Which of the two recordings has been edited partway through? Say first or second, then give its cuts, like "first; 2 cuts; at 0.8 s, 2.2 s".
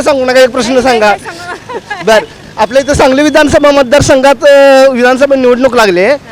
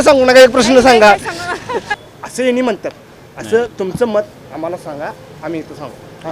second; 1 cut; at 1.9 s